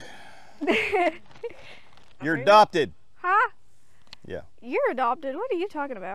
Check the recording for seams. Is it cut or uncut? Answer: uncut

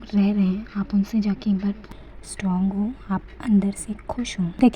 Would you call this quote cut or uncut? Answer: cut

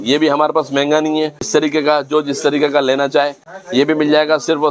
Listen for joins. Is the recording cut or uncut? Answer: cut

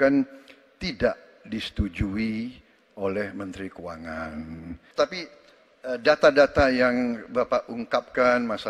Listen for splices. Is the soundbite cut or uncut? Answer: cut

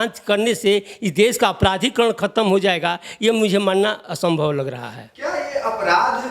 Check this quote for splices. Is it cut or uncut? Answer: uncut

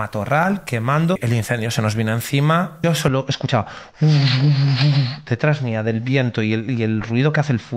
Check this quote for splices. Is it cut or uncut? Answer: cut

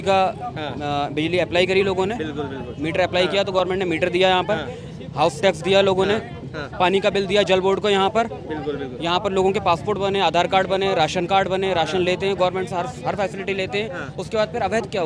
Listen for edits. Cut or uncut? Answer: uncut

